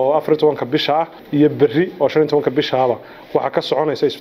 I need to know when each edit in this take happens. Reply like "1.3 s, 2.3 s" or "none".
1.2 s

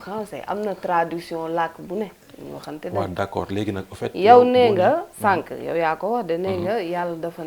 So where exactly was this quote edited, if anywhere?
none

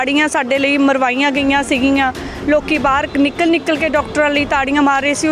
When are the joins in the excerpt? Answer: none

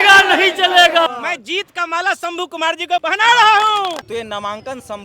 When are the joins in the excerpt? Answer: 1.1 s, 3.0 s, 4.1 s

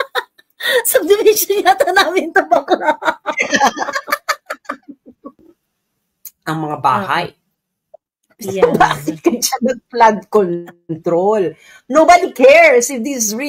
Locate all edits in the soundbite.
5.5 s

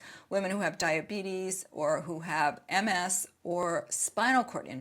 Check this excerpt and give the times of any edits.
none

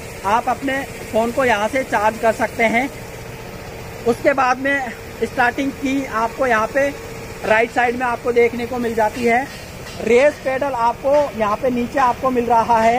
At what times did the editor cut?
none

